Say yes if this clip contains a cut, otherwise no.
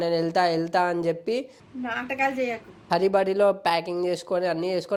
no